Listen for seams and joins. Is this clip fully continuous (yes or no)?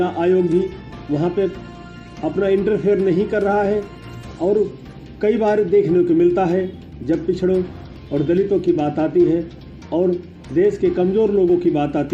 yes